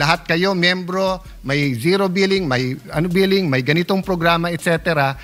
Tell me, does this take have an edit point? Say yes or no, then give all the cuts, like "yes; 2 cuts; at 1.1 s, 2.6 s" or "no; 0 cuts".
no; 0 cuts